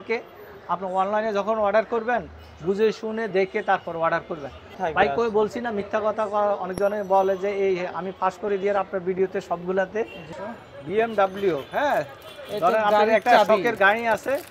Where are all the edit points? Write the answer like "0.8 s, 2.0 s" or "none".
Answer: 4.7 s, 10.3 s